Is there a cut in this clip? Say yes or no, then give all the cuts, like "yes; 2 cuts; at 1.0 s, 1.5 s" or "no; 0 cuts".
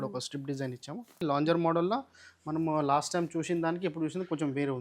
yes; 1 cut; at 1.1 s